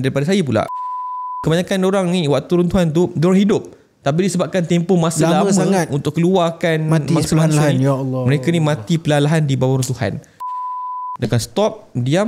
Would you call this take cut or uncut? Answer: cut